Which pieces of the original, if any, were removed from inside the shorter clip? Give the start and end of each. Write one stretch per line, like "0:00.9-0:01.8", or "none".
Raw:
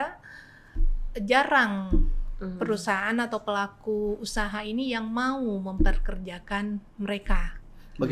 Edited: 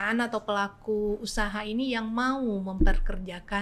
none

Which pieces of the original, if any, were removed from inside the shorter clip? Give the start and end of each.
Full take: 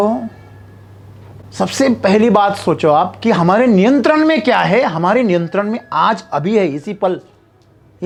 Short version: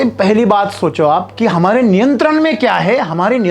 none

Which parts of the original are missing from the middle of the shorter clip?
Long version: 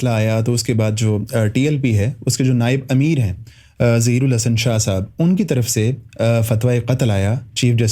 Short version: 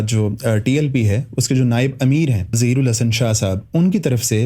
0:03.5-0:04.0

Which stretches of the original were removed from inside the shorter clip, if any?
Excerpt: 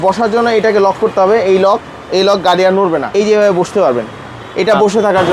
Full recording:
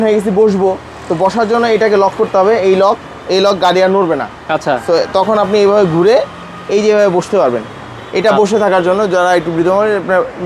0:04.2-0:06.6

